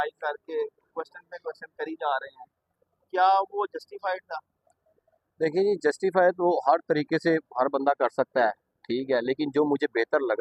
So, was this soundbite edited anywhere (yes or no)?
no